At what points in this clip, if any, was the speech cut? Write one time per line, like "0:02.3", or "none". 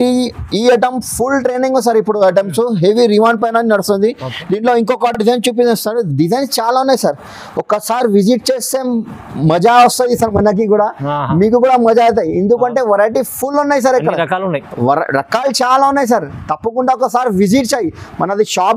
none